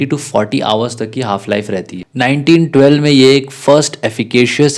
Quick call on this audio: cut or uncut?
cut